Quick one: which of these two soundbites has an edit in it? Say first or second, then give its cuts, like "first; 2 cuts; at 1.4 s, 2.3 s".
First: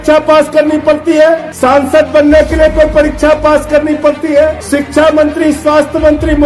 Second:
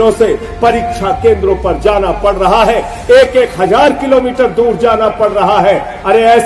first; 2 cuts; at 1.5 s, 4.6 s